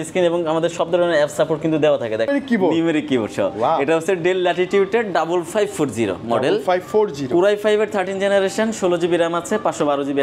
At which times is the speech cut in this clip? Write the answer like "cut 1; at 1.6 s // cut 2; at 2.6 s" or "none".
cut 1; at 2.3 s

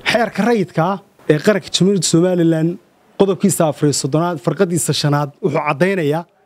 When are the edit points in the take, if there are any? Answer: cut 1; at 1.1 s

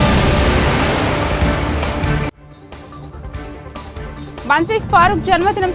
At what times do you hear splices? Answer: none

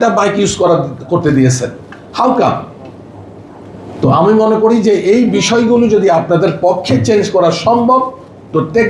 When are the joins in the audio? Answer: none

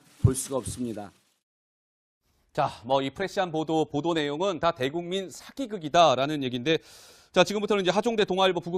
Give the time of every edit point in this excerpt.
cut 1; at 5.7 s

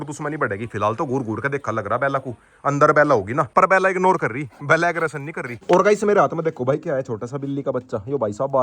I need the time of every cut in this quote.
cut 1; at 3.5 s // cut 2; at 5.5 s

